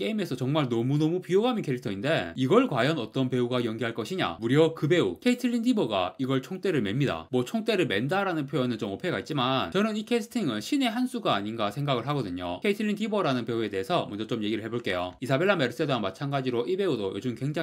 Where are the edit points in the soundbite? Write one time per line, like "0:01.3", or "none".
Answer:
none